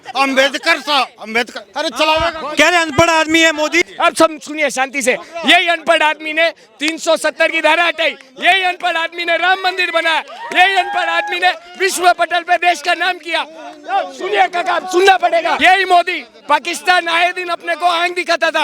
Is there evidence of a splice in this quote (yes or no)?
yes